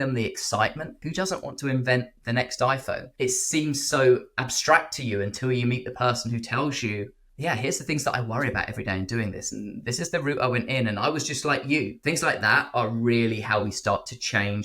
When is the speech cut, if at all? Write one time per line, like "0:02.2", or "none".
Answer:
0:01.0
0:03.1
0:12.0